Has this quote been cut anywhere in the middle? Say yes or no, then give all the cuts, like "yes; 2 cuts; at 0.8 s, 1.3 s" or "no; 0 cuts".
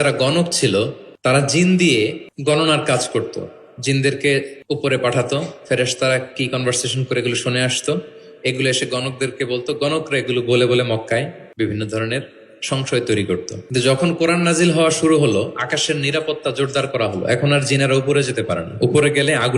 yes; 5 cuts; at 1.0 s, 2.3 s, 4.6 s, 11.4 s, 13.6 s